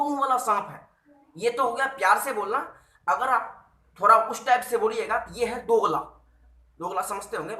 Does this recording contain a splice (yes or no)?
no